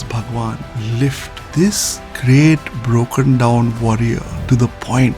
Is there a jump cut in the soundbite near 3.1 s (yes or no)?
no